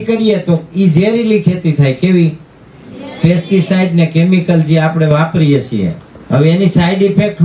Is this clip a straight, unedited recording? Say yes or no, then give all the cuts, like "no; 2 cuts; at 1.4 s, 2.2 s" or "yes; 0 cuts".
no; 1 cut; at 6.1 s